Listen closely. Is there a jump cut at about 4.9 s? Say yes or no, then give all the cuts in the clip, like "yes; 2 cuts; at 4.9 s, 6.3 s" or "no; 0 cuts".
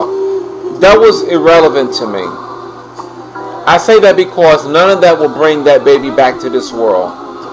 yes; 1 cut; at 4.9 s